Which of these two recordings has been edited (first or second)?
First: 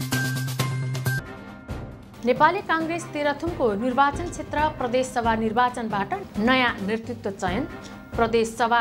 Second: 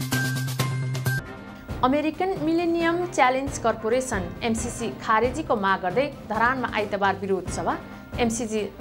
second